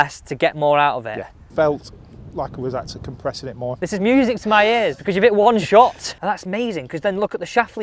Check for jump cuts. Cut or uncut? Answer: cut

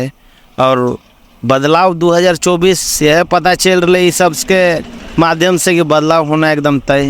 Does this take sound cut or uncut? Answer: uncut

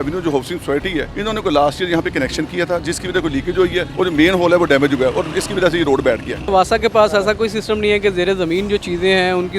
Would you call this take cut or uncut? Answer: cut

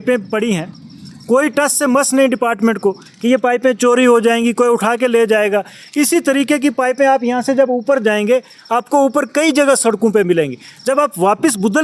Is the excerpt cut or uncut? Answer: uncut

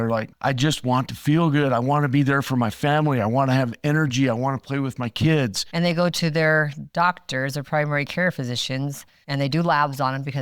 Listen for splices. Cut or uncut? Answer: cut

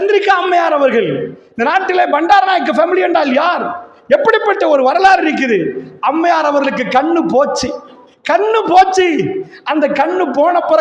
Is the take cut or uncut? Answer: cut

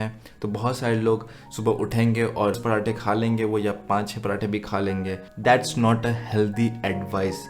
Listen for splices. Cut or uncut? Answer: cut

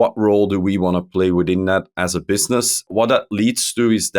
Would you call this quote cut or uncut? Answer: cut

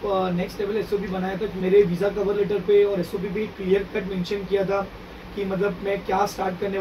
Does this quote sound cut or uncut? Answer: cut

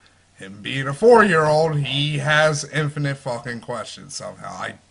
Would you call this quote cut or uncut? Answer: uncut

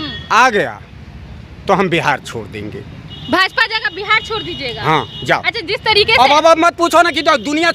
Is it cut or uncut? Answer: uncut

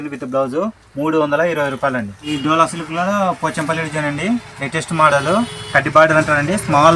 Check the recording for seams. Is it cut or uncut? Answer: cut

